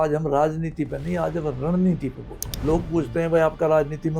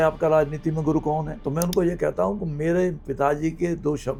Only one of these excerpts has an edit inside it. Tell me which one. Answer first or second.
first